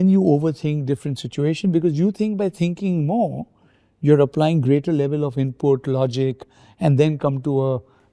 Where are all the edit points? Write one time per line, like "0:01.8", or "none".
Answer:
none